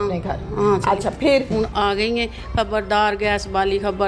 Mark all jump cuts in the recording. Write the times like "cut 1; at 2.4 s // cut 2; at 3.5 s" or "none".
cut 1; at 1.5 s

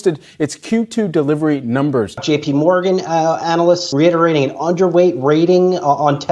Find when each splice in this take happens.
cut 1; at 2.2 s // cut 2; at 3.9 s

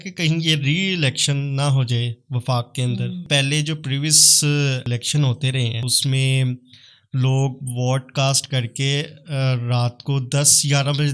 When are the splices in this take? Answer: cut 1; at 3.2 s

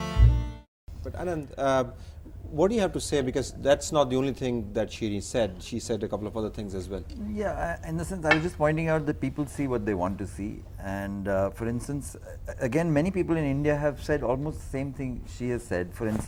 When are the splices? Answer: none

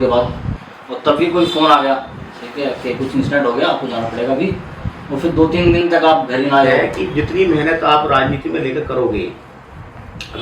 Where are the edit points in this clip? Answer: cut 1; at 6.8 s

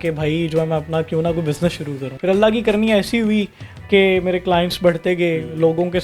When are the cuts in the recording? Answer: cut 1; at 2.0 s

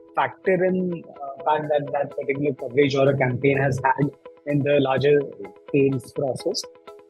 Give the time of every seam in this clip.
cut 1; at 1.3 s

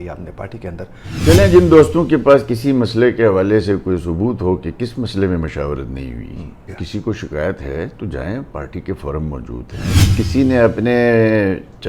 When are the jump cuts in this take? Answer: cut 1; at 1.2 s // cut 2; at 6.8 s // cut 3; at 10.0 s

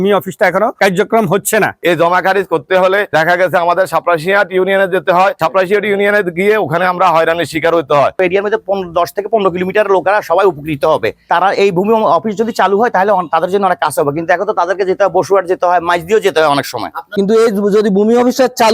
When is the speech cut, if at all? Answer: cut 1; at 1.8 s // cut 2; at 8.1 s // cut 3; at 17.1 s

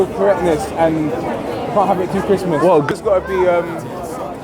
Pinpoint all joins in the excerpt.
cut 1; at 2.9 s

